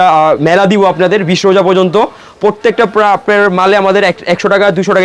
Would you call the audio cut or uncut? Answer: uncut